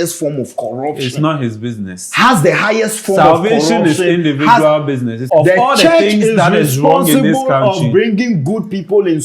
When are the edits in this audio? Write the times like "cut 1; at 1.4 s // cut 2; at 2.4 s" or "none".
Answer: cut 1; at 5.3 s

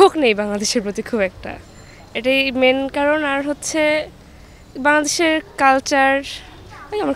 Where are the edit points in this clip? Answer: none

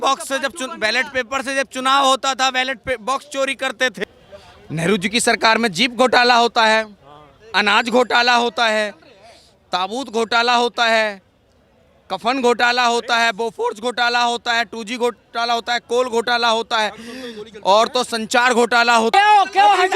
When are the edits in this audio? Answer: cut 1; at 4.0 s // cut 2; at 19.1 s

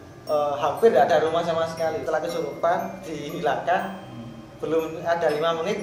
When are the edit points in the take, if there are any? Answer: cut 1; at 2.0 s

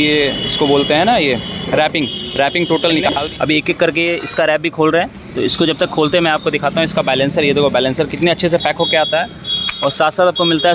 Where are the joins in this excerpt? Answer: none

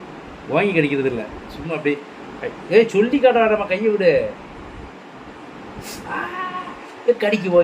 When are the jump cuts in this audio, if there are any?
none

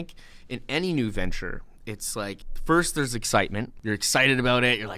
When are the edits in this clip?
cut 1; at 2.5 s // cut 2; at 3.7 s

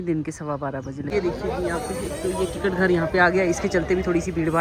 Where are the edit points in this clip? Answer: cut 1; at 1.1 s

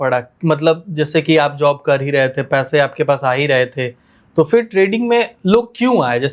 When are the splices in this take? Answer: none

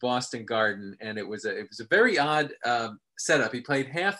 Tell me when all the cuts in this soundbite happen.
none

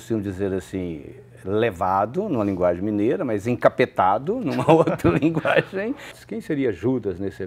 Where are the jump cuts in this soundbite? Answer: cut 1; at 6.2 s

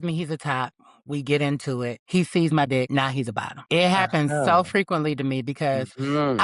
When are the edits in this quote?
cut 1; at 2.0 s // cut 2; at 3.1 s

